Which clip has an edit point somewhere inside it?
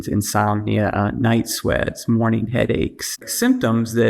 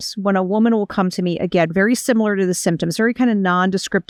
first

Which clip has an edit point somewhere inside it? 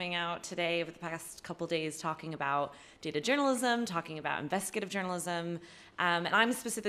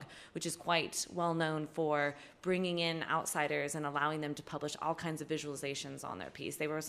second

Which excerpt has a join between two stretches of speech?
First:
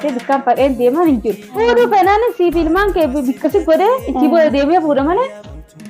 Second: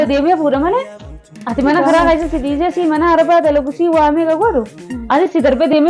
first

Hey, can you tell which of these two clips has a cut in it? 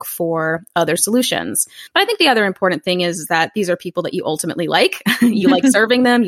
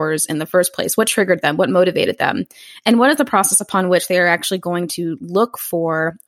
first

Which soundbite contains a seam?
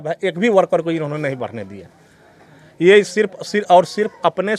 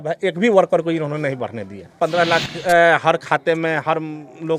second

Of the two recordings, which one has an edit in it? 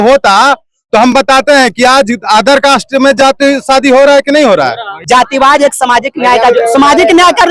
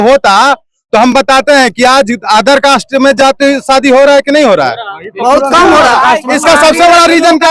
first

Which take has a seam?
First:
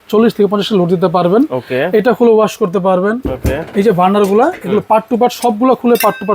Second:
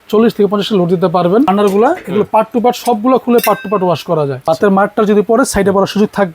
second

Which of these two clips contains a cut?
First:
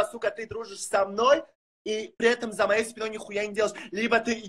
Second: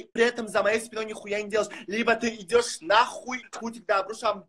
second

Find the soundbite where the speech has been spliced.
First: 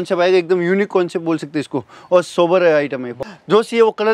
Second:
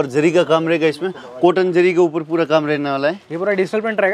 first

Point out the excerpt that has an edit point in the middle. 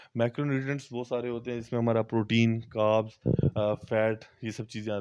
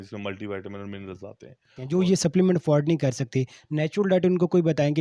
second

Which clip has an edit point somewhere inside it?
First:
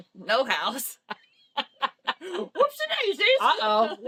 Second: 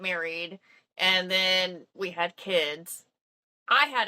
second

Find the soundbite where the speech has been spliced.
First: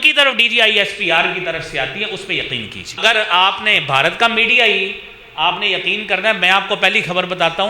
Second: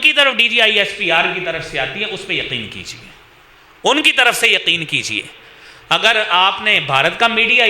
first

